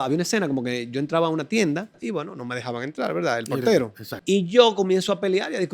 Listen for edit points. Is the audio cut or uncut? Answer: cut